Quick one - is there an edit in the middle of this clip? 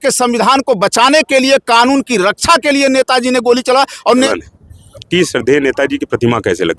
yes; 1 cut; at 4.3 s

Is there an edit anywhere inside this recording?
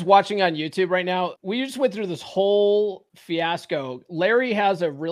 yes; 2 cuts; at 1.4 s, 3.1 s

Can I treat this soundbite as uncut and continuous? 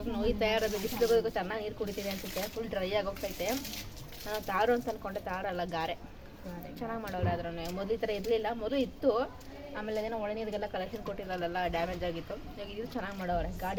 yes; 0 cuts

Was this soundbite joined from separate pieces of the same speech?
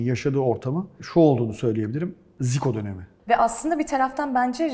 yes; 2 cuts; at 1.0 s, 3.1 s

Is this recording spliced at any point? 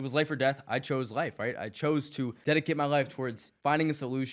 yes; 2 cuts; at 2.4 s, 3.4 s

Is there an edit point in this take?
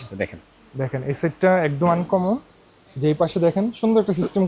no; 0 cuts

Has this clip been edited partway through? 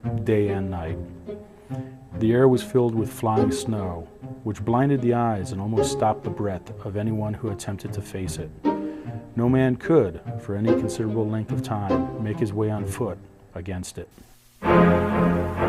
no; 0 cuts

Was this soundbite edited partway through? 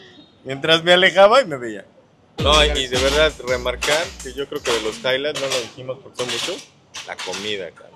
yes; 1 cut; at 2.3 s

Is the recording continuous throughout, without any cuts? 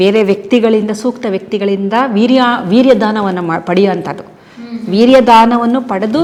yes; 0 cuts

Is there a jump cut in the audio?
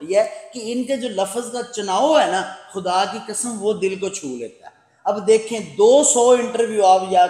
no; 0 cuts

